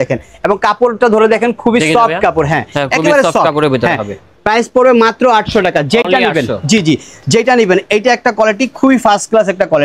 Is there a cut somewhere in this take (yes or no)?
no